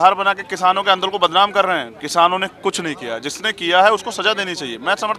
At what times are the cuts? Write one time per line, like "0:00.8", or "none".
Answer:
none